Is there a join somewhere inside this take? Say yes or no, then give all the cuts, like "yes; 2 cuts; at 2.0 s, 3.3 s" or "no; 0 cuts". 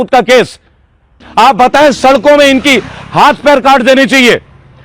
yes; 1 cut; at 1.2 s